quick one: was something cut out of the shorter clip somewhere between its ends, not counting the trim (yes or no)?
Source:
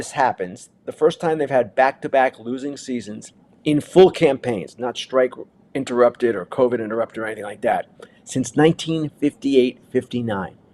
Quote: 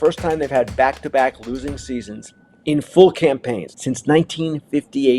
yes